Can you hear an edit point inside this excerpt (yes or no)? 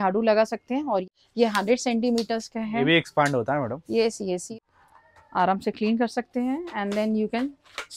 yes